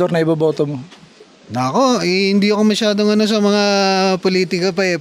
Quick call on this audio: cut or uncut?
uncut